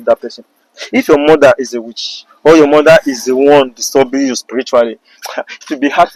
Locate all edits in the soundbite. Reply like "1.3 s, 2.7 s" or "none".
none